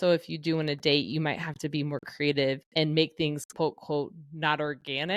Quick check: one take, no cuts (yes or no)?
yes